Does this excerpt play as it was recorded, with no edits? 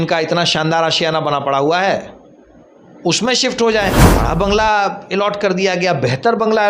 no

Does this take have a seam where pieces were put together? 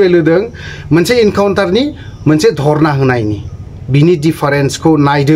no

